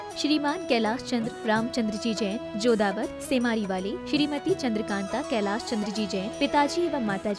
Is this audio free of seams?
yes; 0 cuts

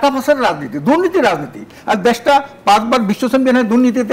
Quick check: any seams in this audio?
no; 0 cuts

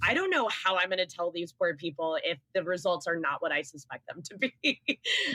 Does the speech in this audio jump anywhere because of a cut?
no; 0 cuts

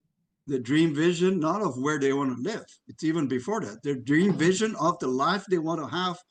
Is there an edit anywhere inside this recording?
no; 0 cuts

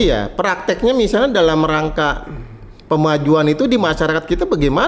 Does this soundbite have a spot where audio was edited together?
no; 0 cuts

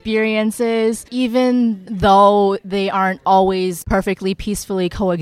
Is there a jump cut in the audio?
yes; 3 cuts; at 1.0 s, 1.9 s, 3.8 s

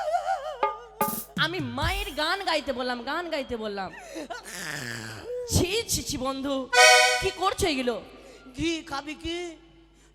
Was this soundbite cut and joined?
no; 0 cuts

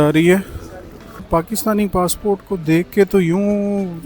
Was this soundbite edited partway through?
yes; 1 cut; at 1.1 s

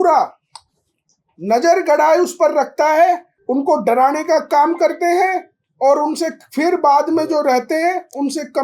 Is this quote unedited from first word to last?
no; 1 cut; at 3.3 s

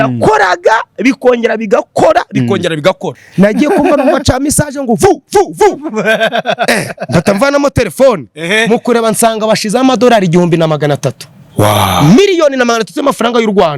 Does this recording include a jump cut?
yes; 1 cut; at 3.1 s

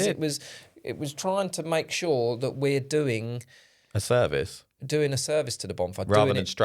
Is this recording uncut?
yes; 0 cuts

